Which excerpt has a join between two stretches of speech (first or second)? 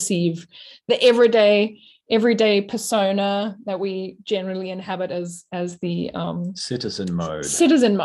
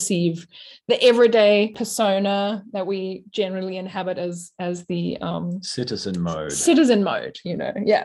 second